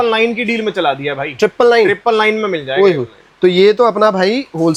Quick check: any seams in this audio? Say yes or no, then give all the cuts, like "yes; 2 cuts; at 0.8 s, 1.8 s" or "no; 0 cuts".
no; 0 cuts